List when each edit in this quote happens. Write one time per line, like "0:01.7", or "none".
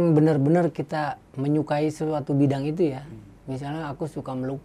none